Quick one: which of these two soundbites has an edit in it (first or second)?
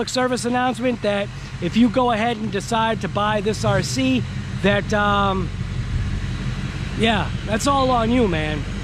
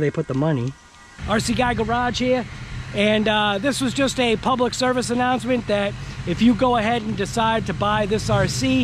second